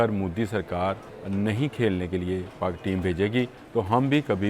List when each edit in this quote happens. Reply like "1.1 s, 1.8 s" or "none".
1.1 s, 3.6 s

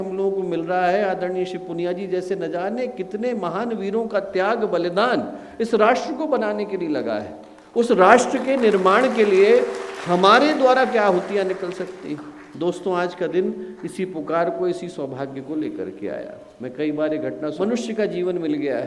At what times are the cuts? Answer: 17.5 s

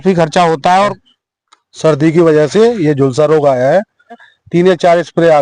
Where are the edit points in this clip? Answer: 1.1 s, 4.3 s

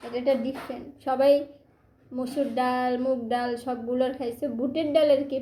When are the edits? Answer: none

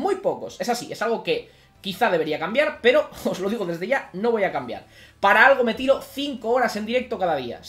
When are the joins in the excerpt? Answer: none

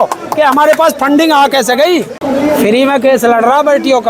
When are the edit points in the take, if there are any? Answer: 2.1 s

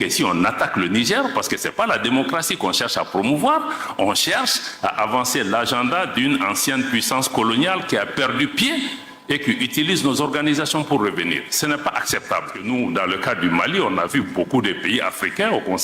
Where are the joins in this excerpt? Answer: 12.6 s

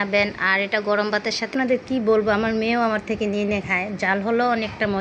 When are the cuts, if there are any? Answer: 1.5 s

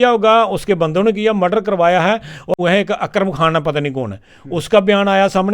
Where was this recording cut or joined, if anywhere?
2.5 s

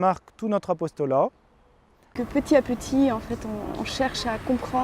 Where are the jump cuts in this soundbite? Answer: 1.8 s

